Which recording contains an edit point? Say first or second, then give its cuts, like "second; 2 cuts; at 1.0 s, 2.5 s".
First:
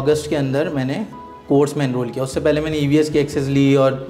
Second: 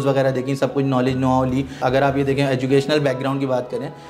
second; 1 cut; at 1.8 s